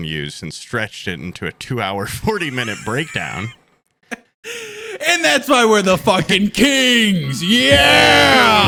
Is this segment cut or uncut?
uncut